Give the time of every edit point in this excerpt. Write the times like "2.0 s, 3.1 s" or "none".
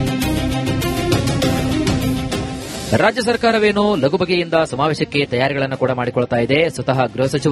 2.7 s